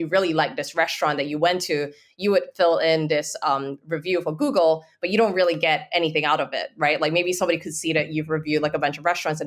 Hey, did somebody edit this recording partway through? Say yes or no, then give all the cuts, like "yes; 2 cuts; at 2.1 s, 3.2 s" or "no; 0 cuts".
no; 0 cuts